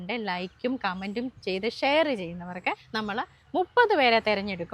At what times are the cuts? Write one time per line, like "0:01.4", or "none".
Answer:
0:02.8

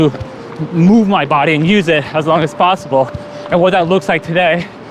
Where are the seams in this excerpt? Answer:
none

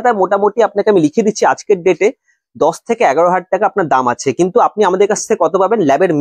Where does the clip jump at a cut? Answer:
none

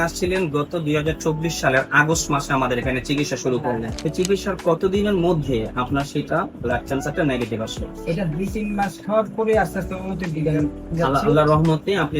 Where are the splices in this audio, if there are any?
0:03.9

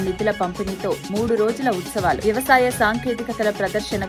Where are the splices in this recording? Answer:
none

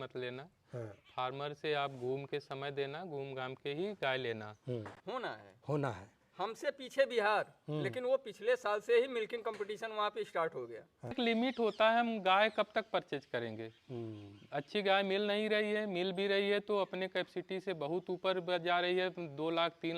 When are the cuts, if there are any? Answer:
0:05.0
0:11.1

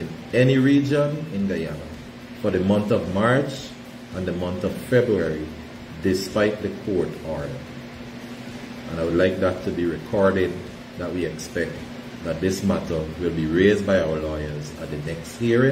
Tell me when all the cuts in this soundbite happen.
none

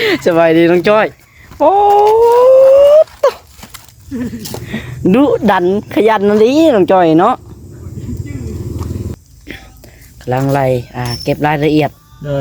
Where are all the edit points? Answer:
0:09.1

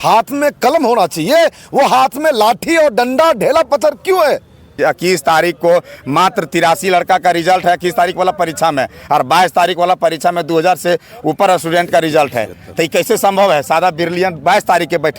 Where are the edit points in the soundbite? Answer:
0:04.8

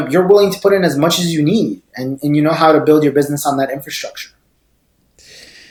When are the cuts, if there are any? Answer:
none

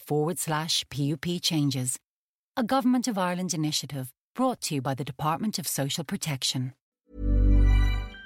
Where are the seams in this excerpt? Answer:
0:06.8

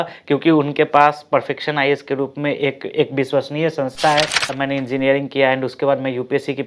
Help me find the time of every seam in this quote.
0:04.5

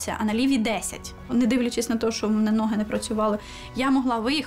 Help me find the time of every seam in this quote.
0:01.3

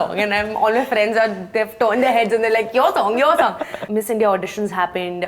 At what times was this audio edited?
0:03.7

